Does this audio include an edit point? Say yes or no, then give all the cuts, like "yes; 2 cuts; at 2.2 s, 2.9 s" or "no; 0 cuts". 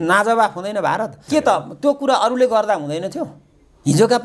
yes; 1 cut; at 1.2 s